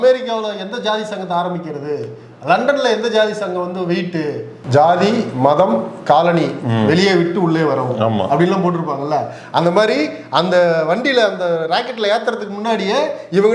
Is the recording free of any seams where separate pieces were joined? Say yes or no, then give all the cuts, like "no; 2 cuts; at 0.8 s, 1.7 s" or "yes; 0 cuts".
no; 1 cut; at 4.5 s